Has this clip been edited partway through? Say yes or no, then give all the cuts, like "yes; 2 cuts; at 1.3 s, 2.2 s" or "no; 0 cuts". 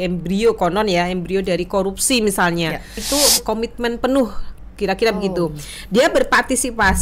yes; 1 cut; at 3.0 s